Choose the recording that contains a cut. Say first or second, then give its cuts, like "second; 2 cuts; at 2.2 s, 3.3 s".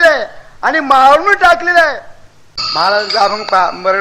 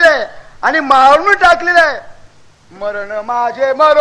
first; 1 cut; at 2.6 s